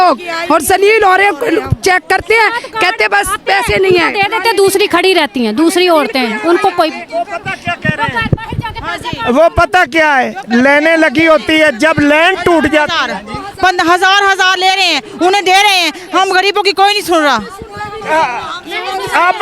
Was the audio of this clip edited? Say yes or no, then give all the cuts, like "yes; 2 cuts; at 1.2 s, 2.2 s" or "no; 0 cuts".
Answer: no; 0 cuts